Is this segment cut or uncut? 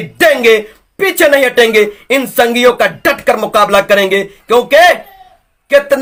uncut